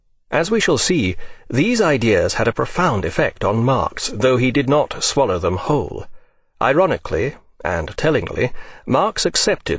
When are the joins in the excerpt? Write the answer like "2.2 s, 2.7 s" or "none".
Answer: 2.3 s